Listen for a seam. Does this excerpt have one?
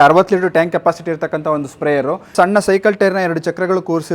yes; 1 cut; at 2.3 s

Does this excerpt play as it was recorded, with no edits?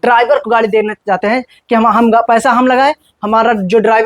yes; 0 cuts

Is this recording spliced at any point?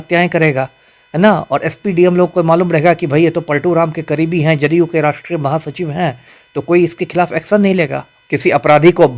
yes; 1 cut; at 8.1 s

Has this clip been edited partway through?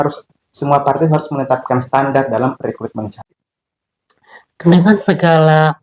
yes; 1 cut; at 3.1 s

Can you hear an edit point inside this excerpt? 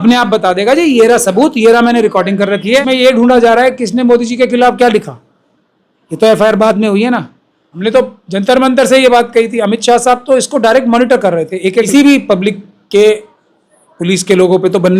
yes; 3 cuts; at 2.8 s, 7.7 s, 11.9 s

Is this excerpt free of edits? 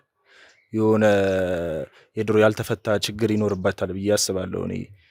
yes; 0 cuts

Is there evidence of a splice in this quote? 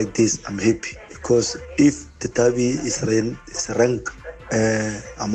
no; 0 cuts

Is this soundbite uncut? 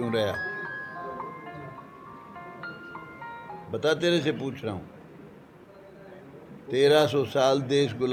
yes; 0 cuts

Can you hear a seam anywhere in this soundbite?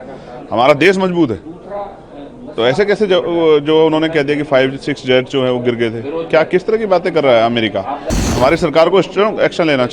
yes; 1 cut; at 8.3 s

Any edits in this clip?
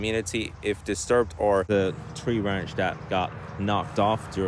yes; 1 cut; at 1.7 s

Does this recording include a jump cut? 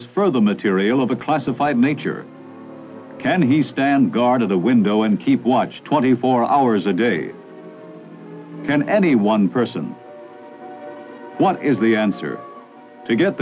no; 0 cuts

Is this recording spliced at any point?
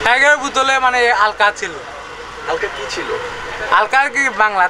no; 0 cuts

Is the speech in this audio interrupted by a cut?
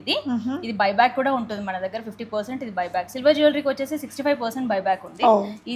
no; 0 cuts

